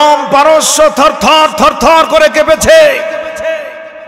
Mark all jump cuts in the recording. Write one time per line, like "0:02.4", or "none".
none